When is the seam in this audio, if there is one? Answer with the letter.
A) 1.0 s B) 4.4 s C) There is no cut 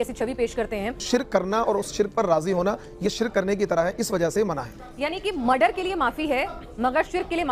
A